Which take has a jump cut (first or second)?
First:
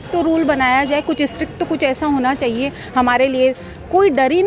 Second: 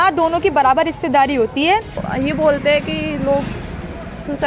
second